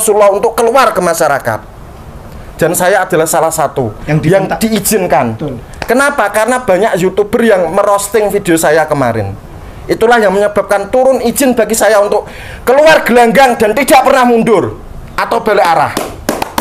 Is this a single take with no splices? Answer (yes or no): yes